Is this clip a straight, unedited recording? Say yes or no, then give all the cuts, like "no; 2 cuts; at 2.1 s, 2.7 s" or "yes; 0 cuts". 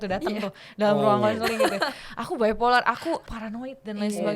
no; 1 cut; at 3.3 s